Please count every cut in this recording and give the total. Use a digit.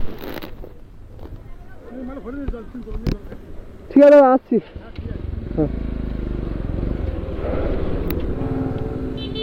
1